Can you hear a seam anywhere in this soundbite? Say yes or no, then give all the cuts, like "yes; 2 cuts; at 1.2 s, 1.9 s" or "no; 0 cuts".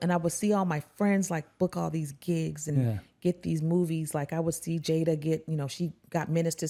no; 0 cuts